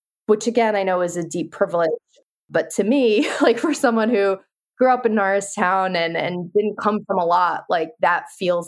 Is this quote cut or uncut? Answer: uncut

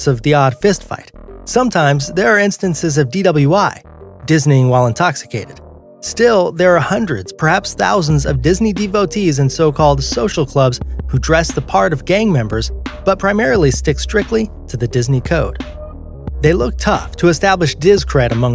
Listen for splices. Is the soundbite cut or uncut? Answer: uncut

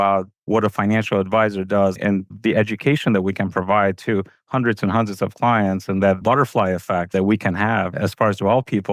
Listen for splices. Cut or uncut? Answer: cut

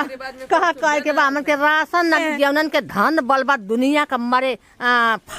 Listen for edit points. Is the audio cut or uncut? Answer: cut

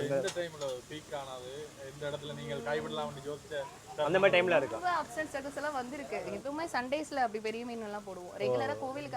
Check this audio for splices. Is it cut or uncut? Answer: cut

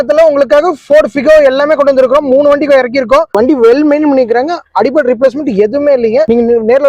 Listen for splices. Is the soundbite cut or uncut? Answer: cut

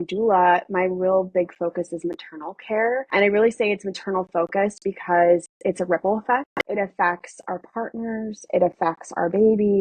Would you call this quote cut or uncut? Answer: cut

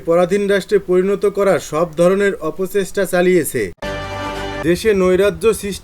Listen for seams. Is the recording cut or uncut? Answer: cut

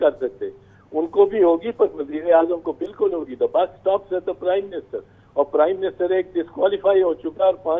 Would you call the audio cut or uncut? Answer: uncut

